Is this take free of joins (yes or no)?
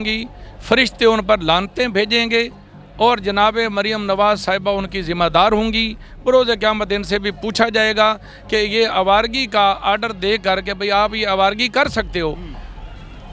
yes